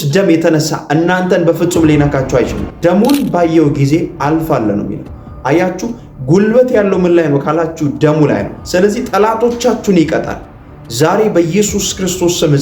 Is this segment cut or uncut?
cut